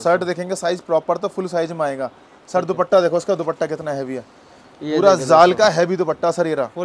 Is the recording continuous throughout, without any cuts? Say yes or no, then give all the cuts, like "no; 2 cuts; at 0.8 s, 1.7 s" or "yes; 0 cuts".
yes; 0 cuts